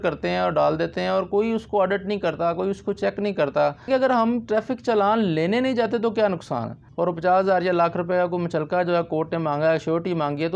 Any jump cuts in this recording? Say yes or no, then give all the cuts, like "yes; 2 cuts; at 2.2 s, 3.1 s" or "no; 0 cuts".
yes; 2 cuts; at 3.9 s, 6.8 s